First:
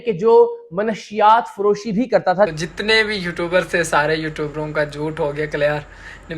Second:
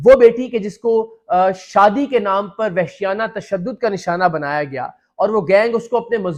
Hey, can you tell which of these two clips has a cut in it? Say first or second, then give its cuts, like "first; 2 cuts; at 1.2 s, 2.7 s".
first; 1 cut; at 2.5 s